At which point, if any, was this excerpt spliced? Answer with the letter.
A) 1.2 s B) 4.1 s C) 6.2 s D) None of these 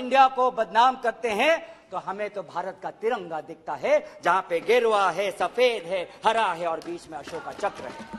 D